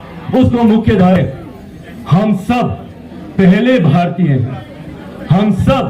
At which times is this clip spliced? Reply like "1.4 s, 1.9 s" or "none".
1.2 s